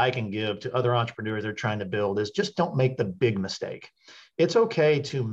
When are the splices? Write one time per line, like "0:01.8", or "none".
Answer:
none